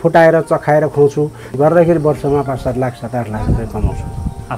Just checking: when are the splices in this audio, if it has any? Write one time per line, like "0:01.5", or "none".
0:01.6